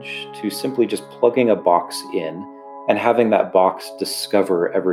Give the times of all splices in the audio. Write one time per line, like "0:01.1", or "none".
none